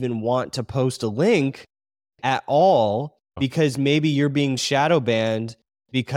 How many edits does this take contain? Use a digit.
1